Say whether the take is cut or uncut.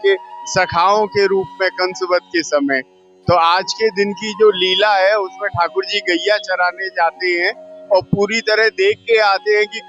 uncut